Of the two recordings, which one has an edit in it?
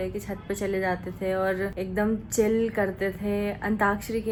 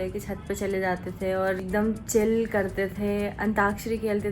second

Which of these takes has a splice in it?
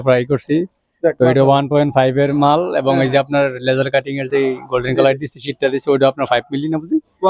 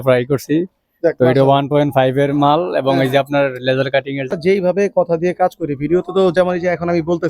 second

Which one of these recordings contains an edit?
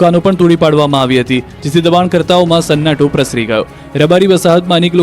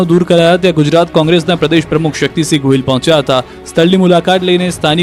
first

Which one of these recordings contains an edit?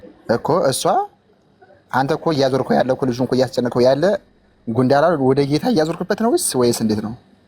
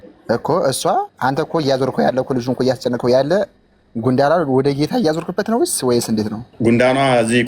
second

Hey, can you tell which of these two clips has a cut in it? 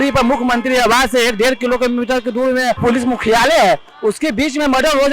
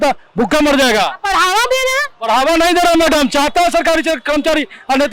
first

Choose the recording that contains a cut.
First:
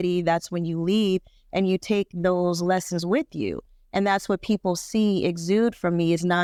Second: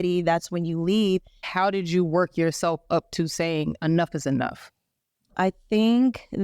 second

